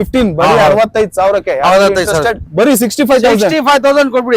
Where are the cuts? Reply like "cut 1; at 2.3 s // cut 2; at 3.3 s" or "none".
cut 1; at 2.4 s